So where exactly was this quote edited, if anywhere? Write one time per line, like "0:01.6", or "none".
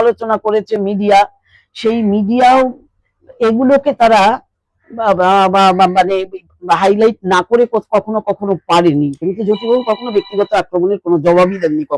0:09.2